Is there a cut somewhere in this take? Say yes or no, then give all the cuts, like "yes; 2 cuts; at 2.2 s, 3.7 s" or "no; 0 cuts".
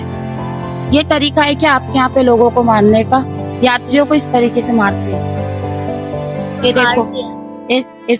no; 0 cuts